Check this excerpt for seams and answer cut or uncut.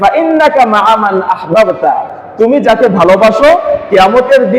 cut